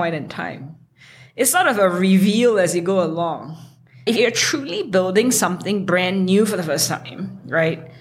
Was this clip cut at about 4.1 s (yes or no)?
yes